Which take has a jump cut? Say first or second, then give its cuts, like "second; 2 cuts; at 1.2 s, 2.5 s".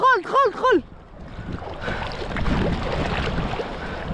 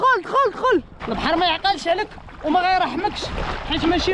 second; 1 cut; at 1.0 s